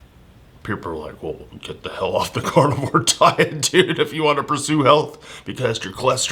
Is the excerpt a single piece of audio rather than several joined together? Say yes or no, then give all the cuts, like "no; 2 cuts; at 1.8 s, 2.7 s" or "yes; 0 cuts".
yes; 0 cuts